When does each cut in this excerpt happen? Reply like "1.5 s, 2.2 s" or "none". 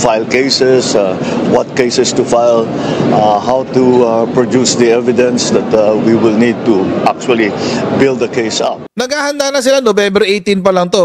8.8 s